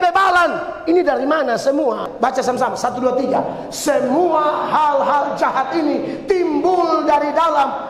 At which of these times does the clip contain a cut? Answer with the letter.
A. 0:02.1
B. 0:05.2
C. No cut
A